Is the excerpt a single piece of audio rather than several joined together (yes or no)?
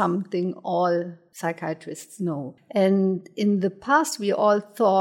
no